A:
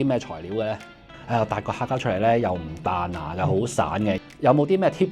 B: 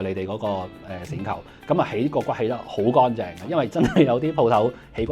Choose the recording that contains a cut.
A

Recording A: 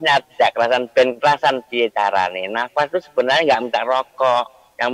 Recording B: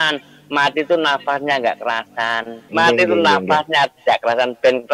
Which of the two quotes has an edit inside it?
B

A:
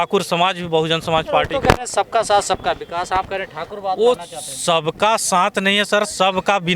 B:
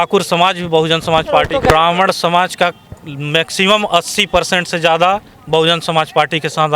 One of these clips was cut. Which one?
B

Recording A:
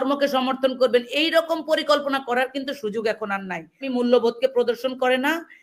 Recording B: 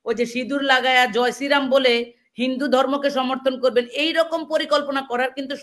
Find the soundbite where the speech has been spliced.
A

